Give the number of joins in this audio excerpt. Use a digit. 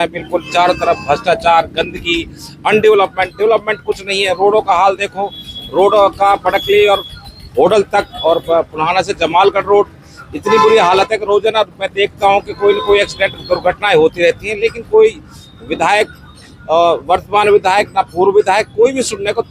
0